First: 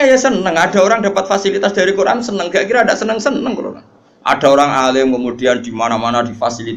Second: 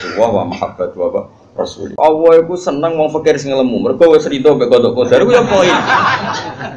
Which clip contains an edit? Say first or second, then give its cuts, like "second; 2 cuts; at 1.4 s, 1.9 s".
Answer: second; 1 cut; at 1.9 s